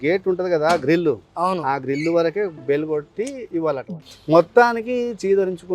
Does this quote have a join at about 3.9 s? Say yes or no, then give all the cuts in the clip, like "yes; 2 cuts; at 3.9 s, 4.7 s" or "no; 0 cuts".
yes; 1 cut; at 3.9 s